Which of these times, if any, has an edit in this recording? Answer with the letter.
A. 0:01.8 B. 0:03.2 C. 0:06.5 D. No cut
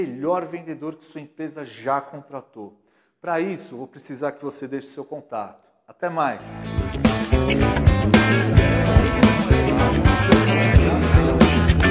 C